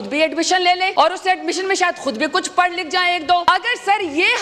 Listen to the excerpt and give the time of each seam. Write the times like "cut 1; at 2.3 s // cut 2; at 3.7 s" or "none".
cut 1; at 0.9 s // cut 2; at 3.4 s